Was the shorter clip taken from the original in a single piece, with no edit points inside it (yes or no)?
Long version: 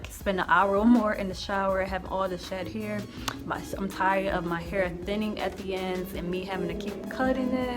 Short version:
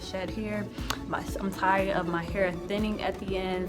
yes